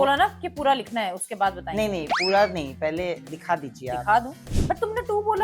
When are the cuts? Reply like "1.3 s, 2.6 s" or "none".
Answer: 4.4 s